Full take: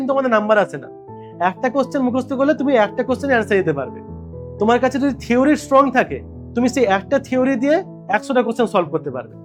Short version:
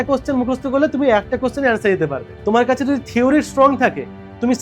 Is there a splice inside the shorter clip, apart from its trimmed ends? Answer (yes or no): yes